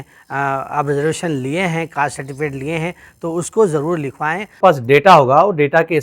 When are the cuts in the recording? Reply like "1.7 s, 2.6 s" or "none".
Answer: 4.5 s